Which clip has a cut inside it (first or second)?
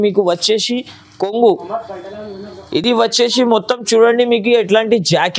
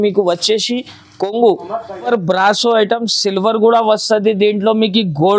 second